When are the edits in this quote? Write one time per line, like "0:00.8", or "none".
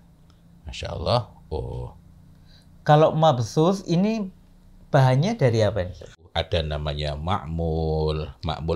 0:06.2